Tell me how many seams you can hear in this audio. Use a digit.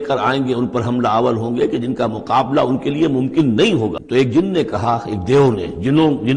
1